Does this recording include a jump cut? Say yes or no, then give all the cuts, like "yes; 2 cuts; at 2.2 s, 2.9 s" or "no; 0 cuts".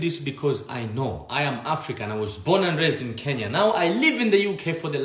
no; 0 cuts